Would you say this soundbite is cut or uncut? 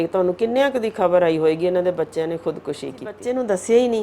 cut